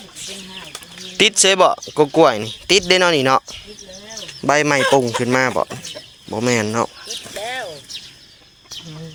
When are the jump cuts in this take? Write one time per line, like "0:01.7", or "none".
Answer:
none